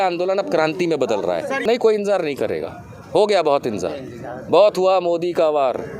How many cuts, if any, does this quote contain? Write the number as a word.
one